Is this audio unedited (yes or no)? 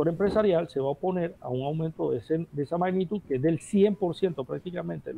yes